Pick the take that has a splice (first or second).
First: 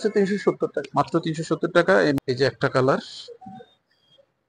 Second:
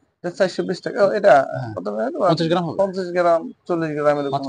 first